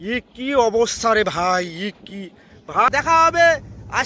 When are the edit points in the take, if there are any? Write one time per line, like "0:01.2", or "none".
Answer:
0:02.9